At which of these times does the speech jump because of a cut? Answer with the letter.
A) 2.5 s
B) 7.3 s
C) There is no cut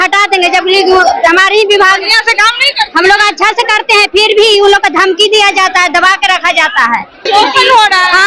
B